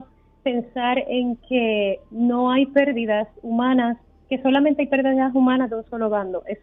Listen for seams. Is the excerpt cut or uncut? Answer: uncut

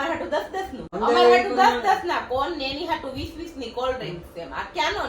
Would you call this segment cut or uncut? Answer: cut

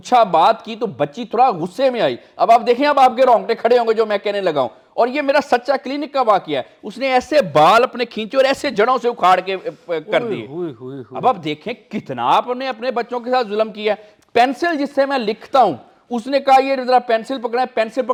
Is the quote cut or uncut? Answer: uncut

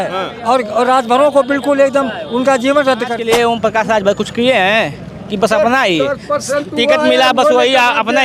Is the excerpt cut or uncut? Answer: cut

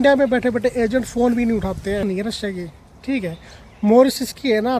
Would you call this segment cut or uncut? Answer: cut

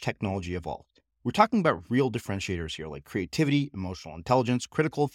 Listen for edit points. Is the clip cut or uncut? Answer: uncut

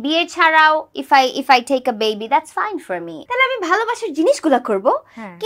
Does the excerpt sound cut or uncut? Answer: cut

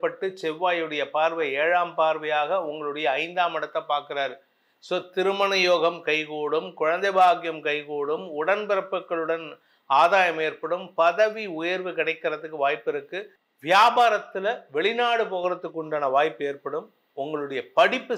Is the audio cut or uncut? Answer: uncut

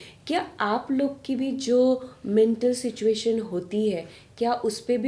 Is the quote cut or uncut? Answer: uncut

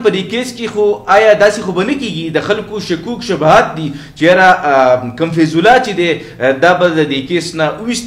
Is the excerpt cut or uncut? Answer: uncut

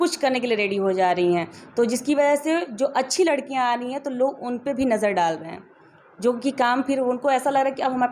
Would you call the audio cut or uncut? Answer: uncut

